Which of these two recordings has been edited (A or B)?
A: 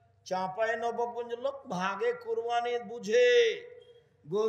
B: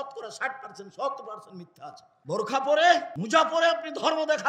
B